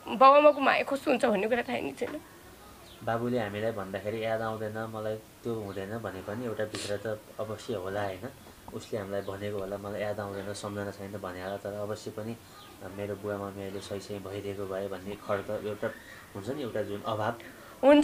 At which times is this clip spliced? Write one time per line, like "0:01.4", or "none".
none